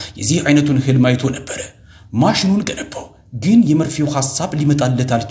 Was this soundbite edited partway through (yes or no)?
no